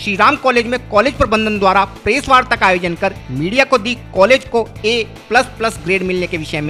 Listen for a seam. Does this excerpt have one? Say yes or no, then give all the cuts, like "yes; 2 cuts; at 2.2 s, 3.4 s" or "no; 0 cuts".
no; 0 cuts